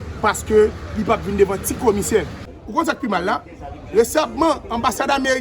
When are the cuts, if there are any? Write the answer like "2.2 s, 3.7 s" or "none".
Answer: 2.4 s